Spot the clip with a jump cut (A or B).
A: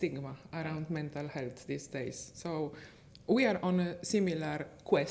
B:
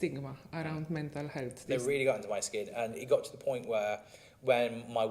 B